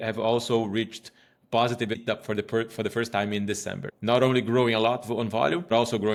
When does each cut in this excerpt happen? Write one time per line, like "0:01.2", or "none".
none